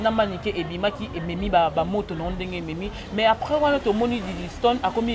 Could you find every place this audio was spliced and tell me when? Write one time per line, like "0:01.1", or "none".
none